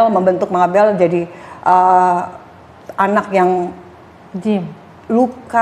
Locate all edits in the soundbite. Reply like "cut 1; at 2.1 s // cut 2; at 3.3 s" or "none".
none